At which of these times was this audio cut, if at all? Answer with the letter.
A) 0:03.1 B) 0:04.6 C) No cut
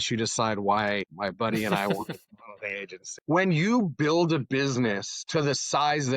A